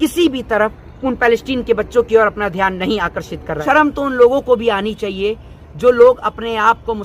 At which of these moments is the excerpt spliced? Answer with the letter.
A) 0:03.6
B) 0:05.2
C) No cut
A